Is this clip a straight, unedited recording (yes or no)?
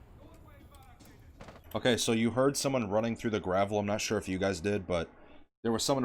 yes